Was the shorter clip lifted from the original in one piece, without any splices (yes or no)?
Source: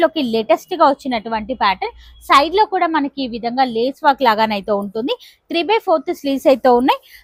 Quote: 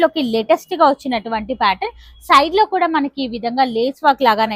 yes